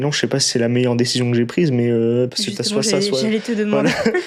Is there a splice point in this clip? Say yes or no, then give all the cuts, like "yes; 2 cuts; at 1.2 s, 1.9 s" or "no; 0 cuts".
no; 0 cuts